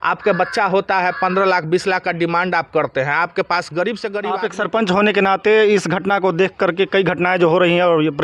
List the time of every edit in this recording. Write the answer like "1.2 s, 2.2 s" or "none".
4.3 s